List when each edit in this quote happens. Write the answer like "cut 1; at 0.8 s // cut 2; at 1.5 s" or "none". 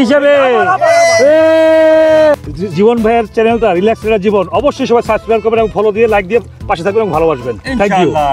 cut 1; at 2.5 s